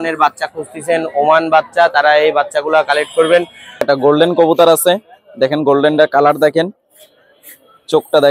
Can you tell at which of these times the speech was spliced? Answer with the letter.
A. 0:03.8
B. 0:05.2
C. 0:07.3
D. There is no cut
A